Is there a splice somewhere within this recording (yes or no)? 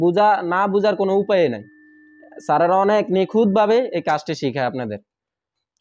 no